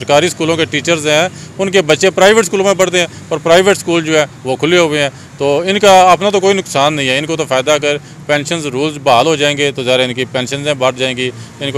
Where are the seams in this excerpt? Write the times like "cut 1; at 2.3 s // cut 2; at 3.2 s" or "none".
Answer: none